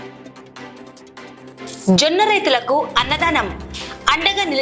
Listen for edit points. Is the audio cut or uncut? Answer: cut